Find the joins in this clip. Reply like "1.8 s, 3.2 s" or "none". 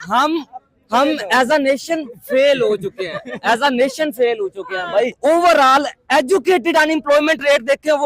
5.2 s